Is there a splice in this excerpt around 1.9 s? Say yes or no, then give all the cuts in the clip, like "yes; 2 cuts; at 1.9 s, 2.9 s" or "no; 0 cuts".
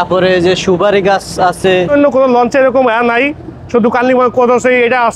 yes; 1 cut; at 1.9 s